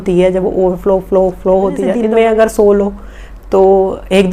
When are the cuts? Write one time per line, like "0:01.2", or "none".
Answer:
0:02.0